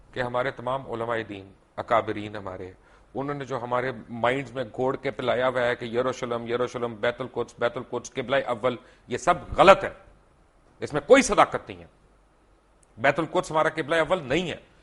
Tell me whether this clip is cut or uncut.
uncut